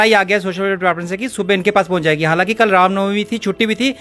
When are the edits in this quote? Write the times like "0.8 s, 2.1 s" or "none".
none